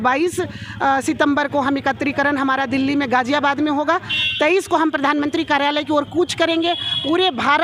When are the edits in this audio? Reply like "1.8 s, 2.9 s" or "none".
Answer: none